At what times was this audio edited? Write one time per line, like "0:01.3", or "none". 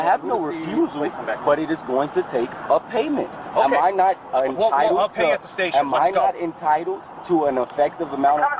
none